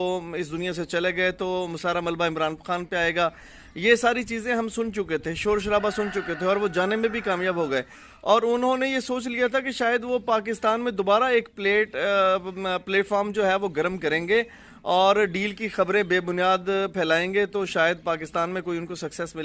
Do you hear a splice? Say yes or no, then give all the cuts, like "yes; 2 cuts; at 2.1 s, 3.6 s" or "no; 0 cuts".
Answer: no; 0 cuts